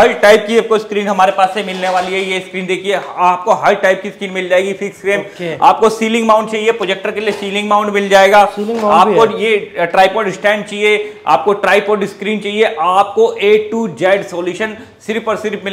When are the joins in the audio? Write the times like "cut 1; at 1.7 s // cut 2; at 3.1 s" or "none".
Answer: none